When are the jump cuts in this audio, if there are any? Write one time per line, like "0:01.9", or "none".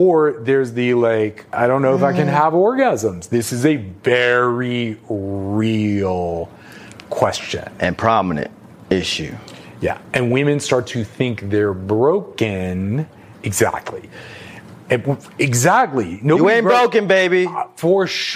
0:01.5